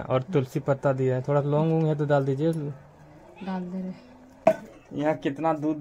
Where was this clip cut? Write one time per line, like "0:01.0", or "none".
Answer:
0:04.3